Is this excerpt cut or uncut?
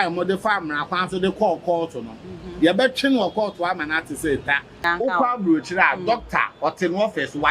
cut